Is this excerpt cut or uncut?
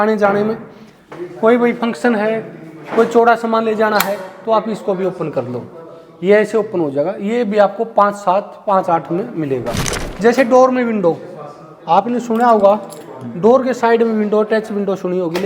cut